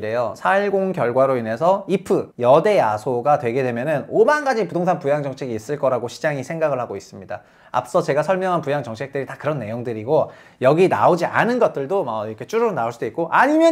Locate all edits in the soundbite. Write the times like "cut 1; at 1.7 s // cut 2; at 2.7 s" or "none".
cut 1; at 2.3 s

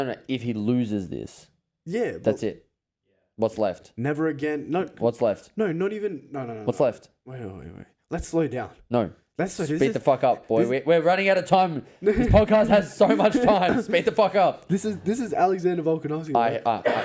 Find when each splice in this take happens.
none

